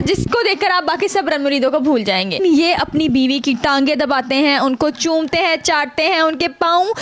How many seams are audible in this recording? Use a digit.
1